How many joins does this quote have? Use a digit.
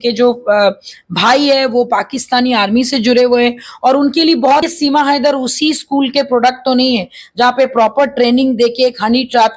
1